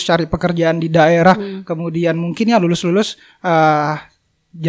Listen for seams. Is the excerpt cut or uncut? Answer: uncut